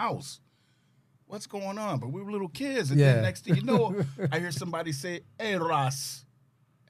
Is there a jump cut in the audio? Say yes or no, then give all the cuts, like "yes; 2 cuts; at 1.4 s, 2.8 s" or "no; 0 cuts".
no; 0 cuts